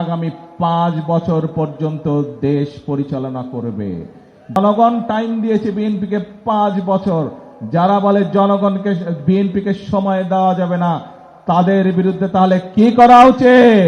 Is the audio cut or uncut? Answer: cut